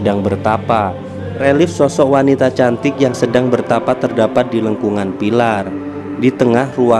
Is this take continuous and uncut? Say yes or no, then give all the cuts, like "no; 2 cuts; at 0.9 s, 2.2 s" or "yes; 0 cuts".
no; 1 cut; at 1.4 s